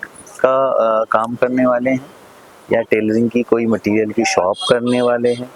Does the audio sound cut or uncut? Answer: uncut